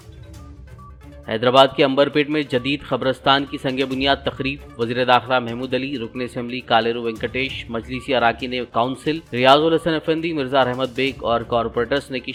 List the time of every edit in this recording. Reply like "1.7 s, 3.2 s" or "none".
none